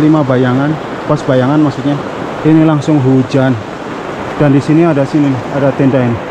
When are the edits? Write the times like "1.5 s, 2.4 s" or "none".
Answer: none